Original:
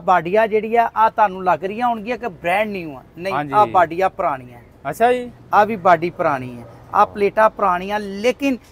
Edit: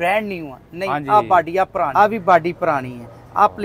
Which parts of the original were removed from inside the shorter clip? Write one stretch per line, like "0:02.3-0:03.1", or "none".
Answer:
0:04.3-0:05.5